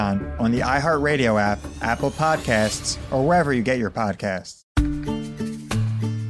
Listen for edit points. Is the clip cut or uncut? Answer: cut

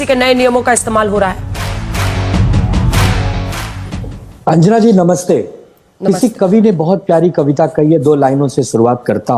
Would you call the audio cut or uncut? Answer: uncut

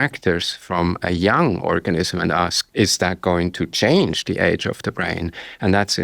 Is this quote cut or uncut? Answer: cut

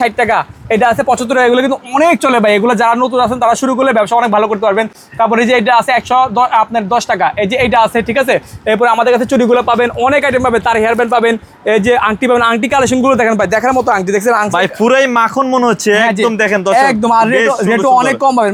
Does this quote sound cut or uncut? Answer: uncut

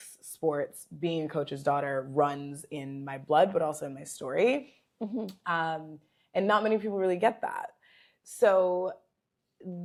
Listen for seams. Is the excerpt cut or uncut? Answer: uncut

